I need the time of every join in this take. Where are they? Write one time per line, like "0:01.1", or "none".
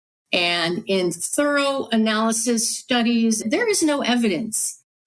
0:03.4